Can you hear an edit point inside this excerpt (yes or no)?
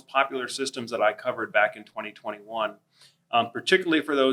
no